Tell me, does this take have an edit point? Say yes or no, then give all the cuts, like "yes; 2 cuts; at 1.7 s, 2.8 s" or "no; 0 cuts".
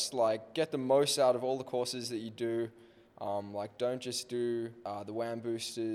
yes; 1 cut; at 4.8 s